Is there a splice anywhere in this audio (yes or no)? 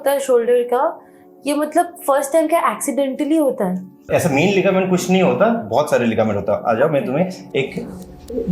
yes